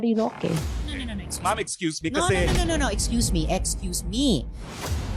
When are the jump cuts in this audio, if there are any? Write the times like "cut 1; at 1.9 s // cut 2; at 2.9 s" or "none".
cut 1; at 2.4 s